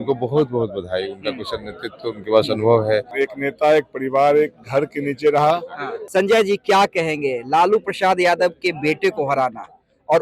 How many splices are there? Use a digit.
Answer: 2